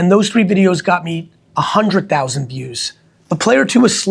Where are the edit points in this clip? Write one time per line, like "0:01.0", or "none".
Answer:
none

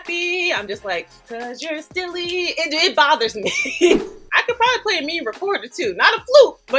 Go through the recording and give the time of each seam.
0:04.0

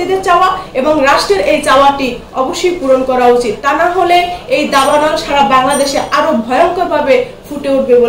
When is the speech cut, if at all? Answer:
none

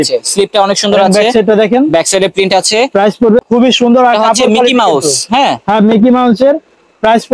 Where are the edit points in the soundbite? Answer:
0:03.4

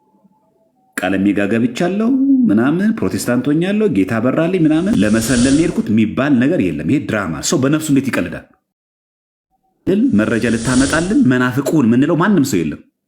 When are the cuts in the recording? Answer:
0:04.9
0:09.9

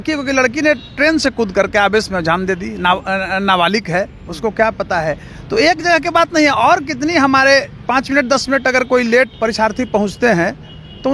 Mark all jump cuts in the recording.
0:07.8
0:09.3

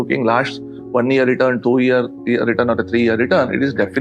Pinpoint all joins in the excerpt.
none

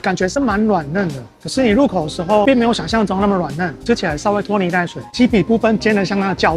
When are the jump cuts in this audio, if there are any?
0:03.8
0:05.0

